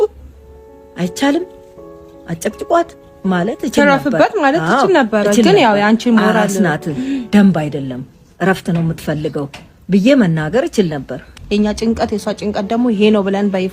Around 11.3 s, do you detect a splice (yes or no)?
yes